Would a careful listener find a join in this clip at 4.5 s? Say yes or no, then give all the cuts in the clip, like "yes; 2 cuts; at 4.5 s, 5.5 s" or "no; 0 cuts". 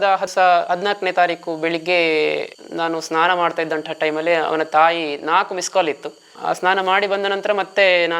no; 0 cuts